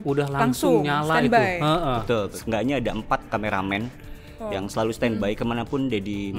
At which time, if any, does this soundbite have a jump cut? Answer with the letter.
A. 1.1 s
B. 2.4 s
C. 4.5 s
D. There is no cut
B